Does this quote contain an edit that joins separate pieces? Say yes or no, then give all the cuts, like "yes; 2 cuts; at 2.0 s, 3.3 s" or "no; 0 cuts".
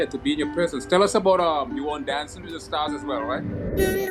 no; 0 cuts